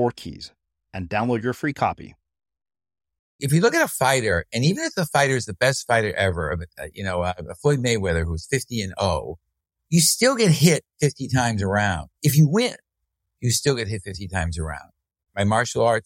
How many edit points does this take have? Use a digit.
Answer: 2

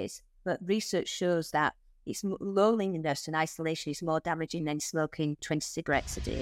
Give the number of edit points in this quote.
0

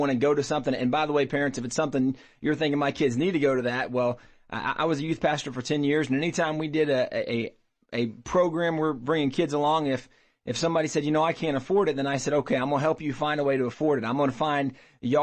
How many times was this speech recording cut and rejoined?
0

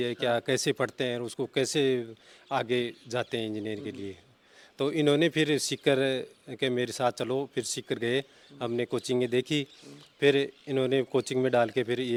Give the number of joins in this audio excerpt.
0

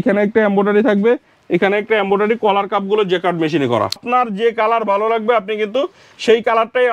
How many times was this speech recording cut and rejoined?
1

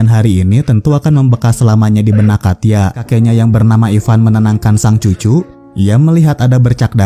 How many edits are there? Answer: 1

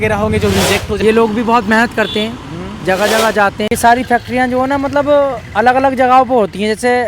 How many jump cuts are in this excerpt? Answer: 2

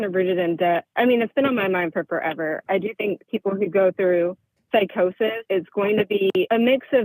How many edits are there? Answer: 2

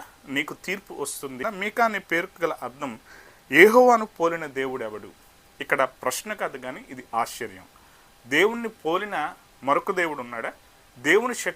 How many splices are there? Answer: 1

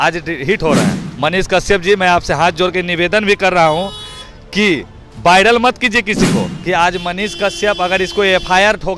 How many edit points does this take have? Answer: 2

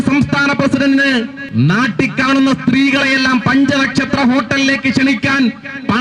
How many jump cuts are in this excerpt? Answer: 1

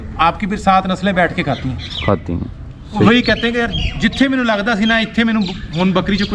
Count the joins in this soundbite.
1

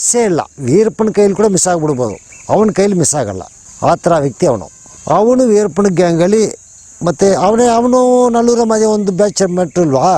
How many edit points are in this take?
0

